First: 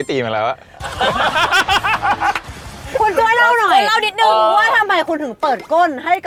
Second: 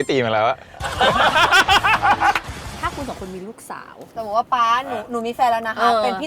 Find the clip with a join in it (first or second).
second